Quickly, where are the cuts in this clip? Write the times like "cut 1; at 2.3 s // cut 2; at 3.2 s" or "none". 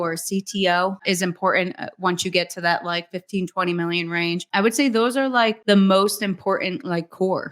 cut 1; at 1.0 s // cut 2; at 4.5 s // cut 3; at 5.6 s

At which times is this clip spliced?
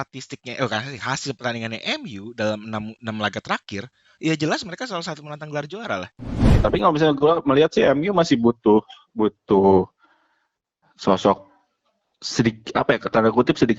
cut 1; at 6.5 s

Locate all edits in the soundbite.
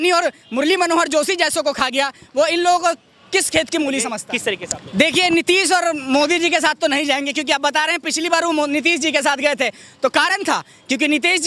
cut 1; at 4.2 s

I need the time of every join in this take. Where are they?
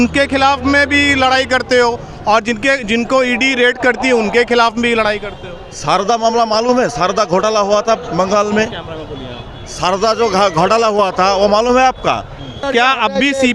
cut 1; at 12.5 s

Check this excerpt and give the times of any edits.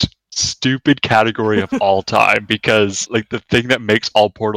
none

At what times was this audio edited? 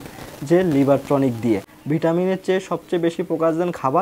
cut 1; at 1.7 s

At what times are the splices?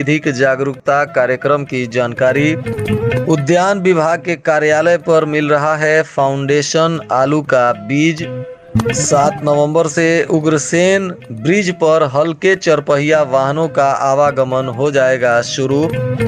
none

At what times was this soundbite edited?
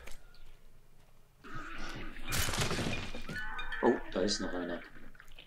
cut 1; at 1.4 s

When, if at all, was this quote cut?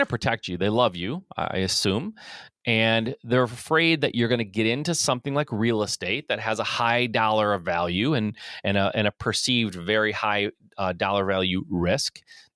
none

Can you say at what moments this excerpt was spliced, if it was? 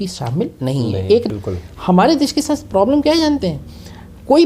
cut 1; at 1.2 s

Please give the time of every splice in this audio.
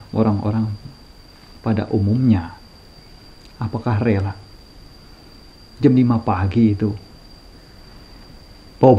none

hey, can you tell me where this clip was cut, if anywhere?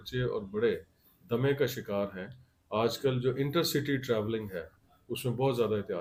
none

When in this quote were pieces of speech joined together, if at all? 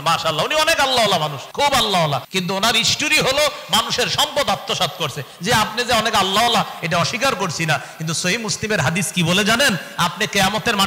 cut 1; at 1.4 s // cut 2; at 2.3 s

